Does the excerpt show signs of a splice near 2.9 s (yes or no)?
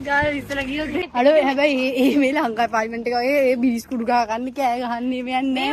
no